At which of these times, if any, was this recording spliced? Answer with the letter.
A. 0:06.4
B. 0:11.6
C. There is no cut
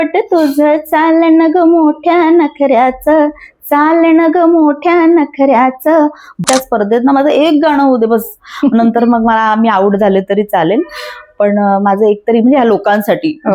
A